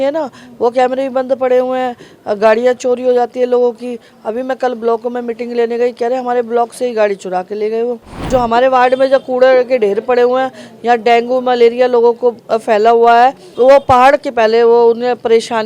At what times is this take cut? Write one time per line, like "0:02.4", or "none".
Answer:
0:08.3
0:13.4